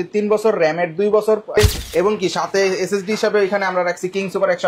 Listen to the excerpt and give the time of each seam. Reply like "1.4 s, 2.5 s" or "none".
1.6 s